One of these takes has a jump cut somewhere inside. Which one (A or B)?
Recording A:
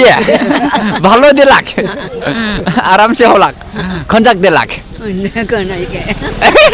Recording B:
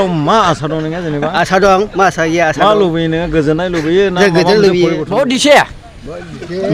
B